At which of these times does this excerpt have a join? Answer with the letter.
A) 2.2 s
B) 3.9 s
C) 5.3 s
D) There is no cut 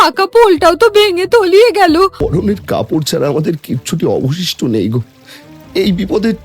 A